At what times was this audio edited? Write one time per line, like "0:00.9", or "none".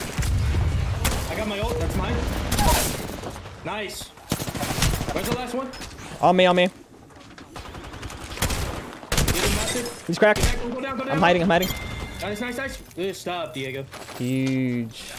0:12.8